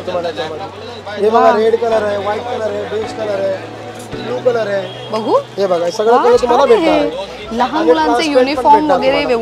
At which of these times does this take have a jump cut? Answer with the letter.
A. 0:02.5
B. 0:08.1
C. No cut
C